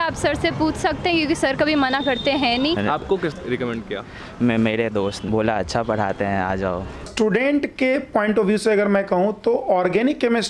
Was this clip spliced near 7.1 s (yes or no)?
yes